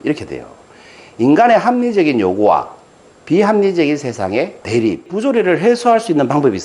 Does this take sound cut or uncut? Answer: cut